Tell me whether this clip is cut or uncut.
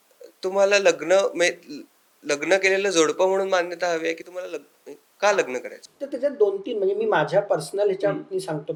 uncut